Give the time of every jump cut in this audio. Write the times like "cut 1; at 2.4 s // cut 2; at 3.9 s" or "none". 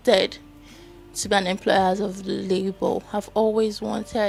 none